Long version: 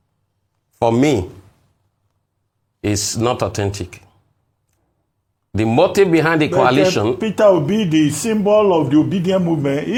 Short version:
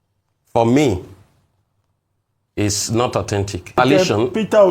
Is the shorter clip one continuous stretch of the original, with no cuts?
no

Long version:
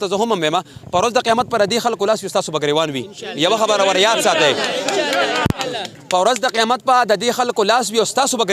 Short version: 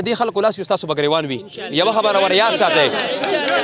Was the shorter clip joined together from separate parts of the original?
no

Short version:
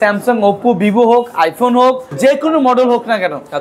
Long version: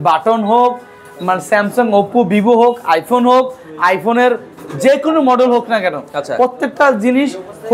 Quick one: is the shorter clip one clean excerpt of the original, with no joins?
no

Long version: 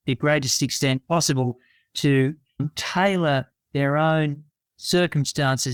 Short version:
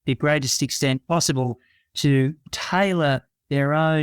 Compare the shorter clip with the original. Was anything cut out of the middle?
yes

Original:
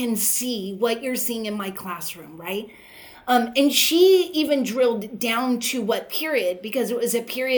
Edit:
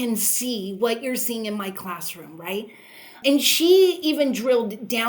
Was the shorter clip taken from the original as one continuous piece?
no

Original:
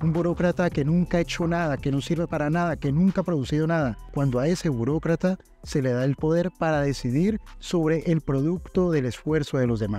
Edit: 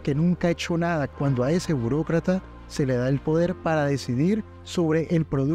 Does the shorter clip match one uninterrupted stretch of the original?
no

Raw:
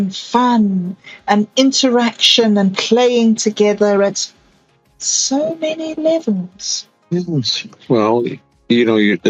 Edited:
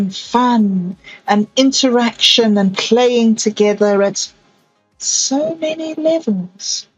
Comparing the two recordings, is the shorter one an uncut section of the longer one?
yes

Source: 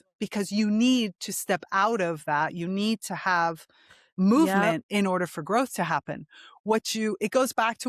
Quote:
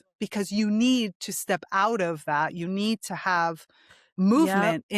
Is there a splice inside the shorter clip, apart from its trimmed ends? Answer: no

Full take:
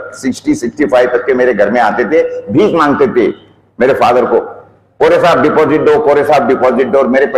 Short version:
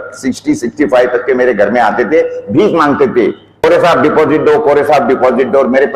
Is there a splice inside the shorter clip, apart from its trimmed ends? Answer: yes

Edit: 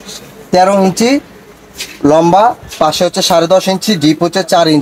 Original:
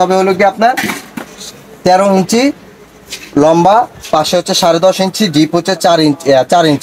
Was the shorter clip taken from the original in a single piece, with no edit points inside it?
yes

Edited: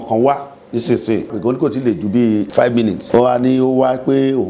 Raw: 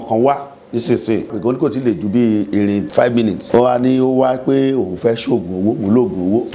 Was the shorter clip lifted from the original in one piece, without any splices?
no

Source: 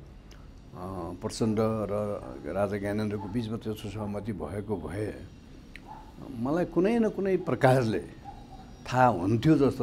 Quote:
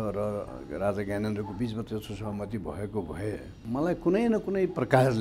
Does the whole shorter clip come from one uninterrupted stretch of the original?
no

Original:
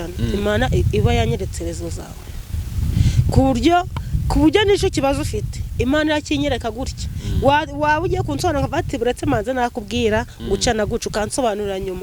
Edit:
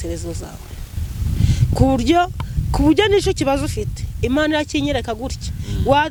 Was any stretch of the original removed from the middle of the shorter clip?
no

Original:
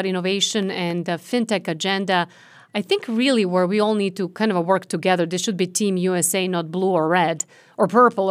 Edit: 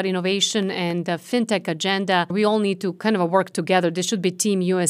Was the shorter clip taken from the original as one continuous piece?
no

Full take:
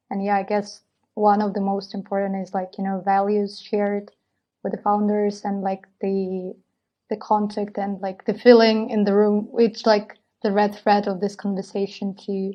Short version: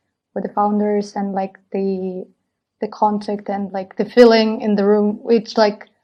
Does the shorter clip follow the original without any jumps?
yes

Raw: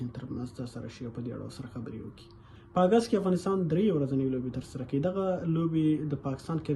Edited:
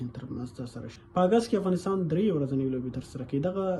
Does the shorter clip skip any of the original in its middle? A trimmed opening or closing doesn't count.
yes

